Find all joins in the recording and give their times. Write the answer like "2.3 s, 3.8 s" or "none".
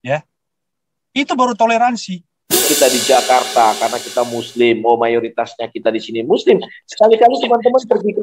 2.7 s